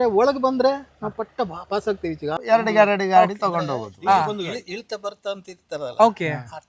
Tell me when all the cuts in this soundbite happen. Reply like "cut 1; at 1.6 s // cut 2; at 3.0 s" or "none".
cut 1; at 2.4 s